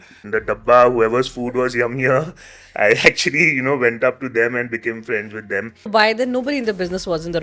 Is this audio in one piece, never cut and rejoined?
no; 1 cut; at 5.8 s

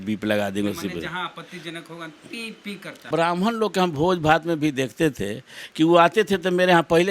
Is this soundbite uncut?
no; 1 cut; at 3.1 s

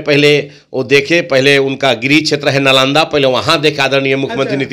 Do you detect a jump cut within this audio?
no; 0 cuts

